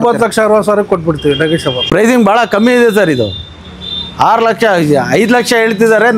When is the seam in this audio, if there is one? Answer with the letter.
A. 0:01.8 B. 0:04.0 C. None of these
A